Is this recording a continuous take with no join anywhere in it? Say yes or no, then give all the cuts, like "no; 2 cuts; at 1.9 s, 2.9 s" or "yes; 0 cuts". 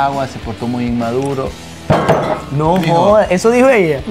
yes; 0 cuts